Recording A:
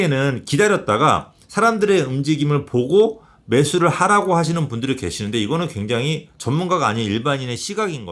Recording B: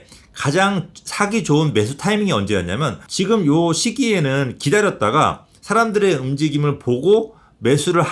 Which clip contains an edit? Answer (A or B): B